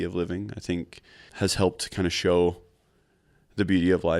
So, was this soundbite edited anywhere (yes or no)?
yes